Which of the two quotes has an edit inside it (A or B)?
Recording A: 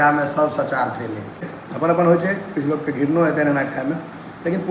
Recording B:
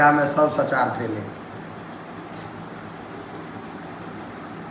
A